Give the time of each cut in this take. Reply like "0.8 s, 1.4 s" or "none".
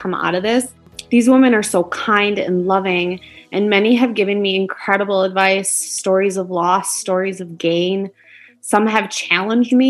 0.9 s